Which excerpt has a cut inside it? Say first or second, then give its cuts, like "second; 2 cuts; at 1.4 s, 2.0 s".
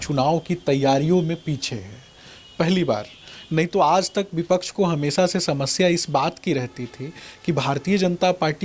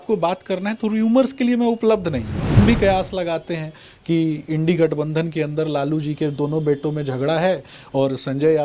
second; 1 cut; at 2.5 s